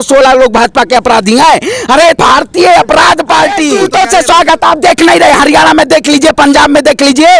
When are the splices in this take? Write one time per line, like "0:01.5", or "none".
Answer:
0:02.2
0:03.7